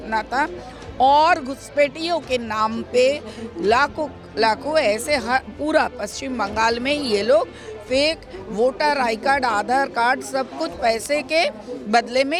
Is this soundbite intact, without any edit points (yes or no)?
yes